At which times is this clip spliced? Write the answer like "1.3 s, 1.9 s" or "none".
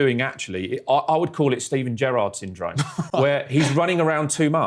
none